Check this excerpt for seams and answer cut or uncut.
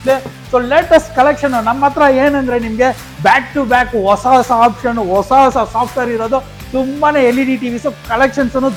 uncut